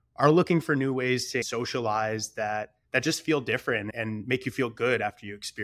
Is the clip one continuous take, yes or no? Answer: no